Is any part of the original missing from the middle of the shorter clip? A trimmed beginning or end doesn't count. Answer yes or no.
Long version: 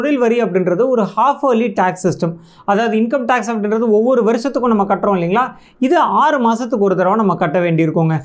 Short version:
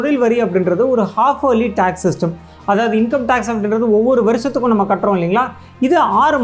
no